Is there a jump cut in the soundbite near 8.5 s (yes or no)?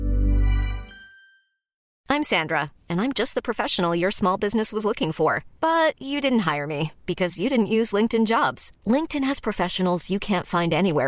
no